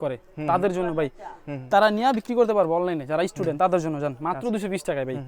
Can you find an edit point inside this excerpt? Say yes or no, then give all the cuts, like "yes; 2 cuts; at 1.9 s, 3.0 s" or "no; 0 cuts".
no; 0 cuts